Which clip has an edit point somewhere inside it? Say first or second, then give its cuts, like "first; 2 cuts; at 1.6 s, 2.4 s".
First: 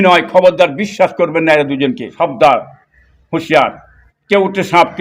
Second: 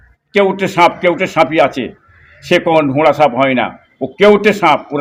first; 1 cut; at 2.0 s